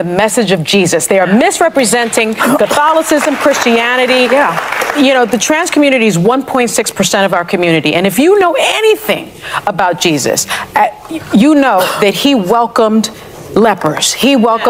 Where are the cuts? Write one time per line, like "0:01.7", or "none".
none